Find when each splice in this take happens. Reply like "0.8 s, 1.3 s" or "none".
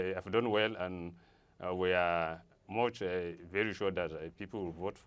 none